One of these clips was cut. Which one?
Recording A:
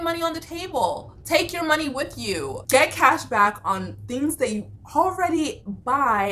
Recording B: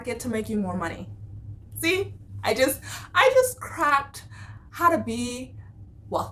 A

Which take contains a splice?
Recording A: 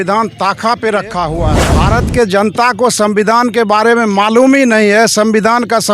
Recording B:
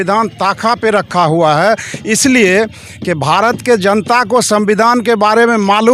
A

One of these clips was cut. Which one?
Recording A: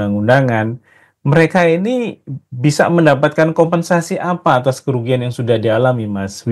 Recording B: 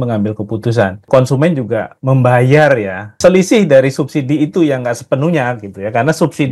B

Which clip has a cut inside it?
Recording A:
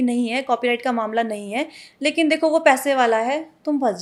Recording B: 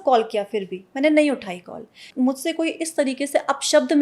B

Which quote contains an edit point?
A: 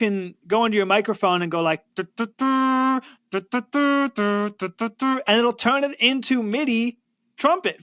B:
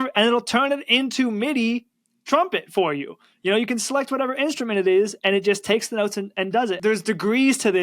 B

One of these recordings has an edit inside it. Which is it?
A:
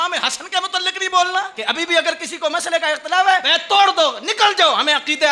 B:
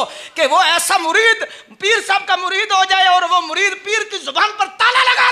A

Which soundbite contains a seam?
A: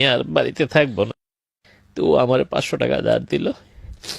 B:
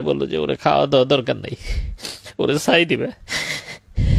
A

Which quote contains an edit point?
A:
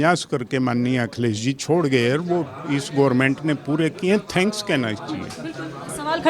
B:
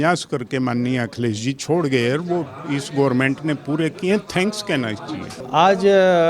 B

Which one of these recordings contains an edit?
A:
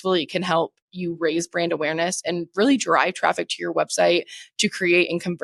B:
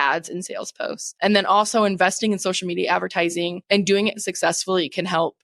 B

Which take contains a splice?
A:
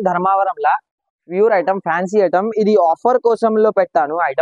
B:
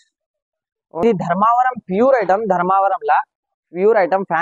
B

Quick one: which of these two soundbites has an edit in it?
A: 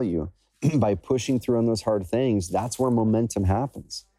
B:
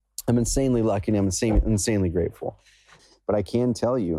B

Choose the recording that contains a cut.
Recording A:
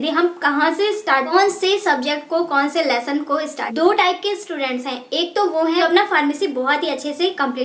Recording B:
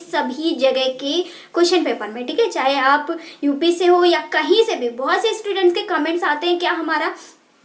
A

